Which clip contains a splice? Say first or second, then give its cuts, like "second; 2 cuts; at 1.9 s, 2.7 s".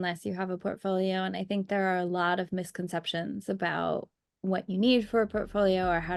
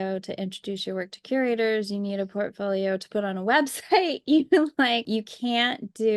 second; 1 cut; at 5.0 s